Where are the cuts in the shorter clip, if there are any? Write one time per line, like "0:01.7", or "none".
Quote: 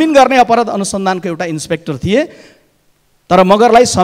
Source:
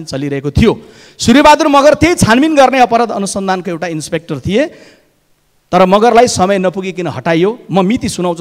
none